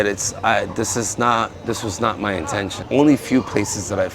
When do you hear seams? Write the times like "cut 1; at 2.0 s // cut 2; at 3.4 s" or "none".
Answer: cut 1; at 2.8 s